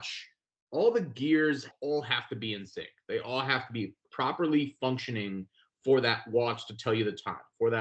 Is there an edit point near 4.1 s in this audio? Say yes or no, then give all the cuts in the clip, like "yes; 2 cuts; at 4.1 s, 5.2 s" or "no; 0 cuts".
yes; 2 cuts; at 1.7 s, 4.1 s